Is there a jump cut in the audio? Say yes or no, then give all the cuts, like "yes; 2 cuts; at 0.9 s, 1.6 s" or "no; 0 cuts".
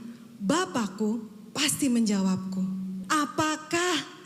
yes; 1 cut; at 2.9 s